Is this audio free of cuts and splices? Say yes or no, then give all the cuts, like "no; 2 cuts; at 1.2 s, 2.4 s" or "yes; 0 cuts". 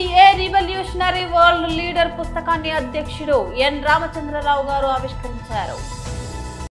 yes; 0 cuts